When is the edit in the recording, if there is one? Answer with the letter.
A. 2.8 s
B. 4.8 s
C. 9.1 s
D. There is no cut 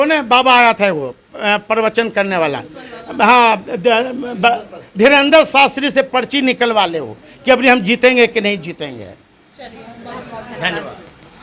D